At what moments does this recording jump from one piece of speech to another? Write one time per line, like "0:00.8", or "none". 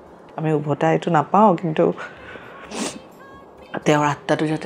none